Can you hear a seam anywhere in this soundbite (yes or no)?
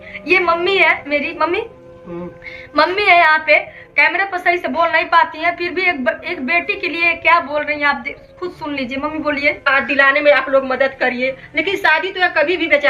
yes